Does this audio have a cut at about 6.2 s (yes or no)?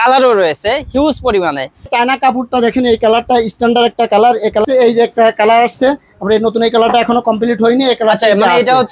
no